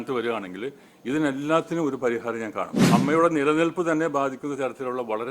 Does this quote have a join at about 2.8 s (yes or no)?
yes